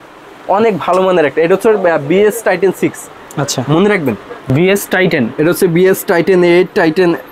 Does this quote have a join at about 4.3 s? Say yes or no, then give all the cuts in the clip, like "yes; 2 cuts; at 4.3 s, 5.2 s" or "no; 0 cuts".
yes; 1 cut; at 4.3 s